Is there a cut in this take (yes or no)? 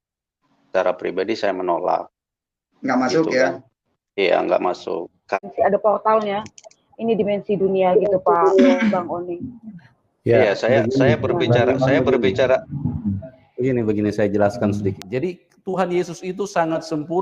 yes